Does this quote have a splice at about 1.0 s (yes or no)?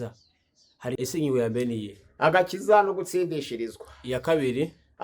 yes